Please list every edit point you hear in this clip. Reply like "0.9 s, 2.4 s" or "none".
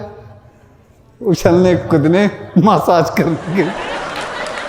3.7 s